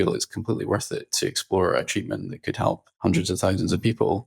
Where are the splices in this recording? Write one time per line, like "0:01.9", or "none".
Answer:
0:02.9